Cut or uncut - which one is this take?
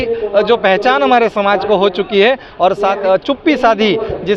cut